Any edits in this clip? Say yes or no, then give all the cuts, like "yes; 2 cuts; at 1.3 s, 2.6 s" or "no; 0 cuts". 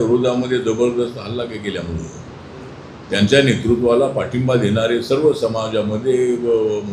no; 0 cuts